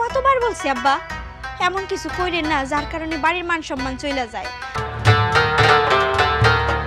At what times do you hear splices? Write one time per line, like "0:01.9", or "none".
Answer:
0:04.8